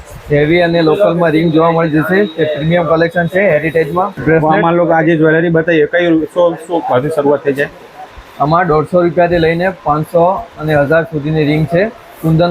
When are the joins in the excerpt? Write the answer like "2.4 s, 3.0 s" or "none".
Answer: none